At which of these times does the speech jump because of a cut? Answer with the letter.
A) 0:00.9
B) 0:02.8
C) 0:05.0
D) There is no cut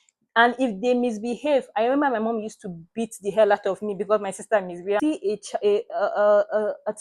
C